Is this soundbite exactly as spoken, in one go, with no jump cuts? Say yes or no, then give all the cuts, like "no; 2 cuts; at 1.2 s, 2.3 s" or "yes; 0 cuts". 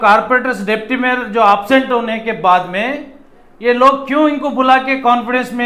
yes; 0 cuts